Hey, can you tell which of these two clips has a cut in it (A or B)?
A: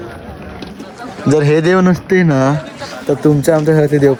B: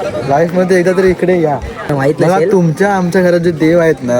B